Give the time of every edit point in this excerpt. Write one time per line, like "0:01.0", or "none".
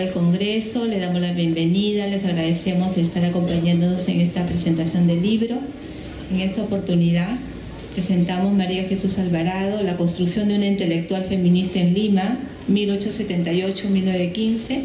none